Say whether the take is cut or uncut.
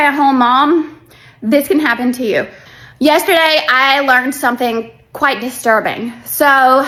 uncut